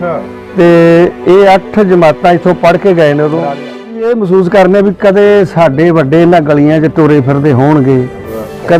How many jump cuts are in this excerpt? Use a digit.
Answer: 1